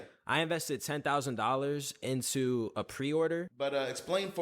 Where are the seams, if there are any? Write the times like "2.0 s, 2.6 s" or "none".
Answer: 3.5 s